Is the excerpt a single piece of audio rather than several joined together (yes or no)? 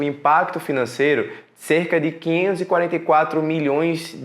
yes